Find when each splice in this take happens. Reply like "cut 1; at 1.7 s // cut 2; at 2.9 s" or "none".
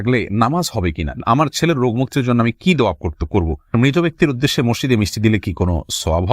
cut 1; at 1.1 s // cut 2; at 3.7 s